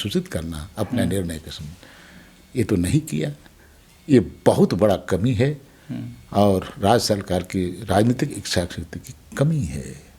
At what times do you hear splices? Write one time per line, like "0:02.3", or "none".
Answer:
none